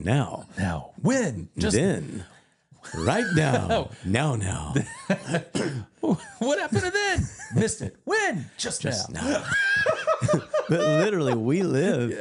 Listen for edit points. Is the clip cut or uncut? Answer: uncut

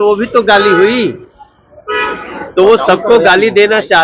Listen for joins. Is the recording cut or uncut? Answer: uncut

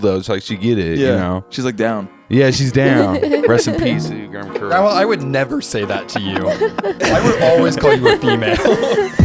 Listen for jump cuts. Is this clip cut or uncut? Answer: uncut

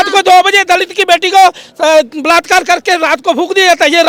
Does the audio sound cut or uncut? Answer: uncut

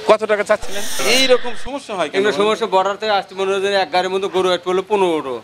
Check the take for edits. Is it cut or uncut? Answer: cut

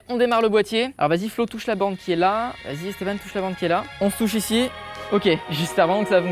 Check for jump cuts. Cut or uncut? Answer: cut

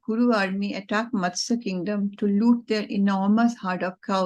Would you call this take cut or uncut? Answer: uncut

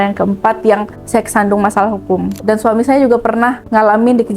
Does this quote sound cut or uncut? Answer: cut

